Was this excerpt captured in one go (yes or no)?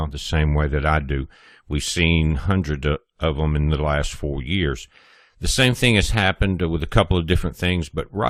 yes